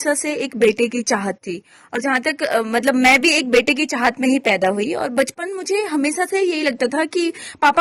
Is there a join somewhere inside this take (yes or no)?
no